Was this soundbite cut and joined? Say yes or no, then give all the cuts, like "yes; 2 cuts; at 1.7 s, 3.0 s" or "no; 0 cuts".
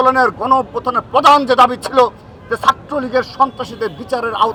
no; 0 cuts